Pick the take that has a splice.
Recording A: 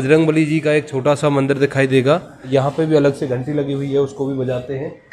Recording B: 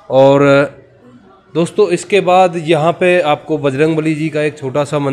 A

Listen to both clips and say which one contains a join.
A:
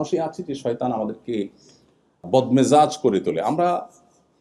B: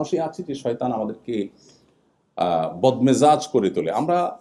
A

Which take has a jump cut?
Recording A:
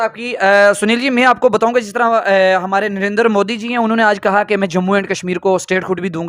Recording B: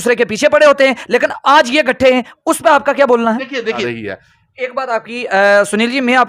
B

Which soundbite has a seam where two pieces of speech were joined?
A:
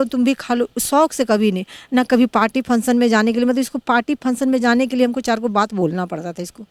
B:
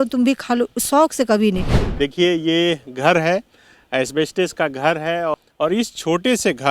B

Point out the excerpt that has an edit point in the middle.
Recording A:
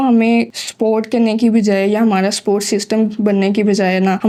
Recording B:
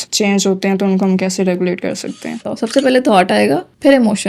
B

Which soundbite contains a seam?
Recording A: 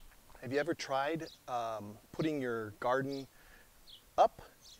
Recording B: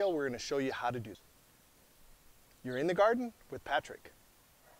B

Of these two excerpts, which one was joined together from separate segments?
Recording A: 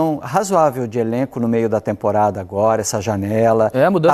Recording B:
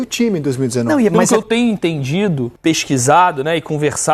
B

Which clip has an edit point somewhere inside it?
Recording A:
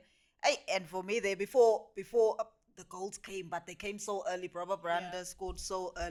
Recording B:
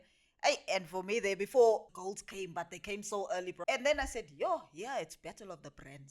B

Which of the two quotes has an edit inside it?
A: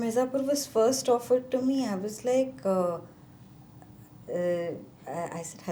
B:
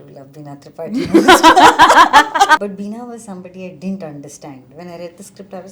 B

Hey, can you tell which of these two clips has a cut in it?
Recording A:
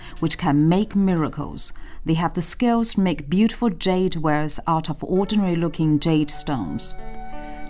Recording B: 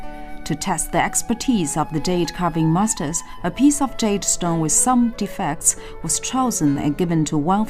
A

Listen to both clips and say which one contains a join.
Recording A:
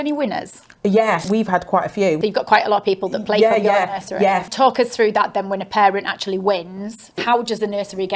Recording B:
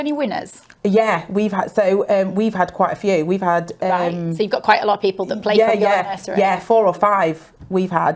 A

